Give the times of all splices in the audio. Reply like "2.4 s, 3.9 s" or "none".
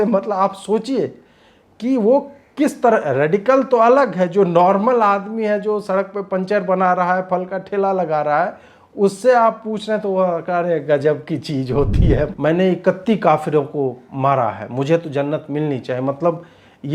12.3 s

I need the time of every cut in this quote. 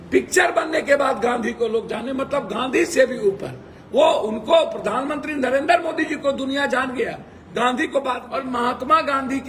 8.3 s

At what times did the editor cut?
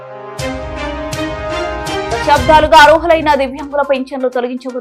2.1 s

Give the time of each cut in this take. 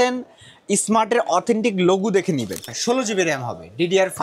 2.7 s

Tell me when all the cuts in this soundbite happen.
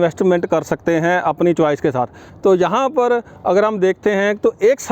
2.2 s

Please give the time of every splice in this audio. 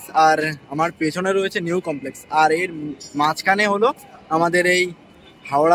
none

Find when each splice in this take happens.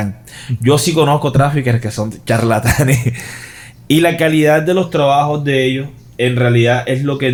none

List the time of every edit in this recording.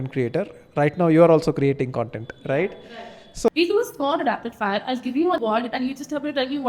3.5 s, 5.4 s

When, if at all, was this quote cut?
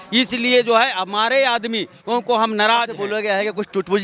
3.0 s

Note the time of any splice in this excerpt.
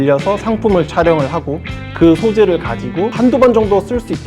3.1 s

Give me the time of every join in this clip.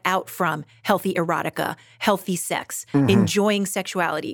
none

